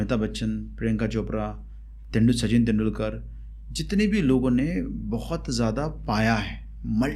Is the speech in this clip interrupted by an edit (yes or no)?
no